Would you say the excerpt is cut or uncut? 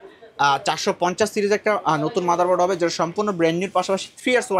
uncut